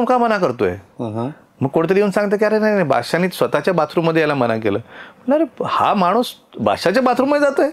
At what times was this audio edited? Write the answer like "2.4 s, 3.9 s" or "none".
none